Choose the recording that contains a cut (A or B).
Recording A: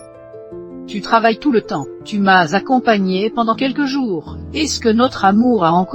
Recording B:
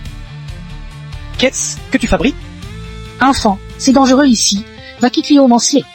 A